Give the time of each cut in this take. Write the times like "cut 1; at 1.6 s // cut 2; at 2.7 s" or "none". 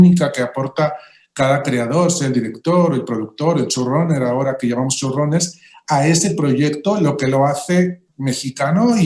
cut 1; at 8.1 s